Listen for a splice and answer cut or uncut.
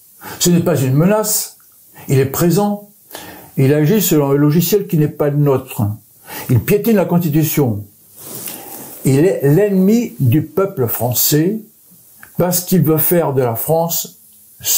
uncut